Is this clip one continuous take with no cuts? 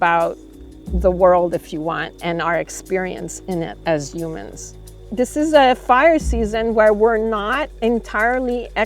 no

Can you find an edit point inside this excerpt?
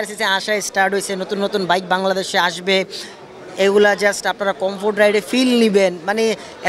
no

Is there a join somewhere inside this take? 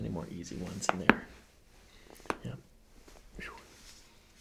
no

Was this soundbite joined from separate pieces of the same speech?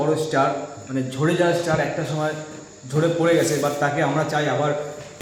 no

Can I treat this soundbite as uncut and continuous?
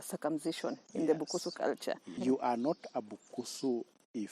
no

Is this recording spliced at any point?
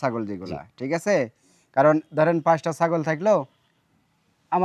no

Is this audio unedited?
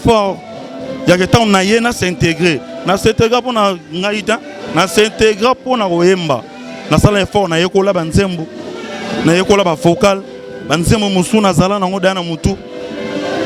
yes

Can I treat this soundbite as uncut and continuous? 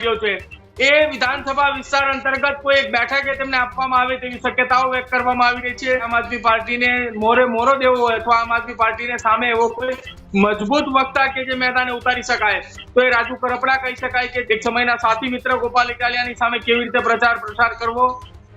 no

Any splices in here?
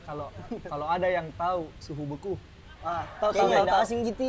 no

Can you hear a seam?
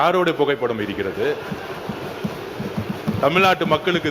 no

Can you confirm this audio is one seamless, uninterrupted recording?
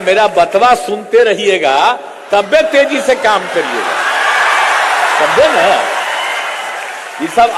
yes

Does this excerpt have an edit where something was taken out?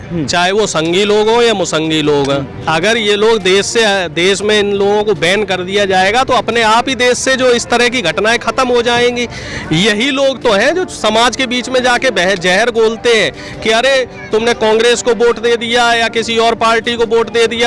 no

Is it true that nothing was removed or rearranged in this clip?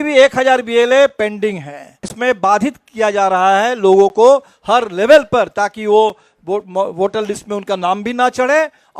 no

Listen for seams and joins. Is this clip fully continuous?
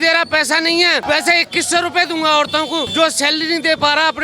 no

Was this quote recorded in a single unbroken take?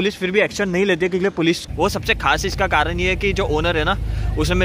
no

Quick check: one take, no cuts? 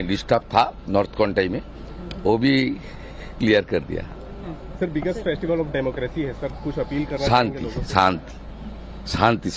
yes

